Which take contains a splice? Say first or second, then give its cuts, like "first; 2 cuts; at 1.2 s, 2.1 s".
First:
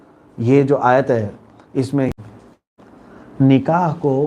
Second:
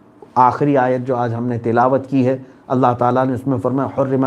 first; 1 cut; at 2.1 s